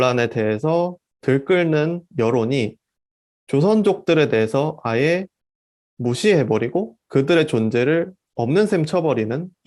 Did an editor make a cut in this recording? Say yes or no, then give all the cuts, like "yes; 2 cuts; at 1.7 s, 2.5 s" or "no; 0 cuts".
no; 0 cuts